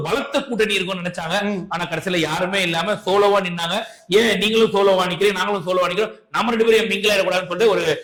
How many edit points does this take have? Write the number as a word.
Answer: zero